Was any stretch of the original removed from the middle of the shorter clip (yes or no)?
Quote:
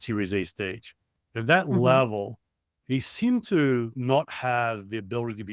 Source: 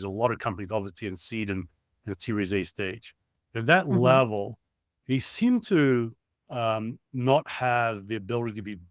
yes